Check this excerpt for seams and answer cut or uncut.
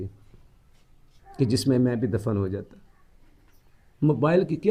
uncut